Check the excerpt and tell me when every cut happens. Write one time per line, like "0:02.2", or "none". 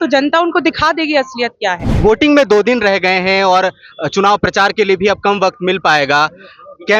0:01.9